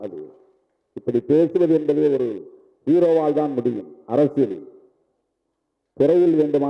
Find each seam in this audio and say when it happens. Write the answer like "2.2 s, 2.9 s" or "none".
none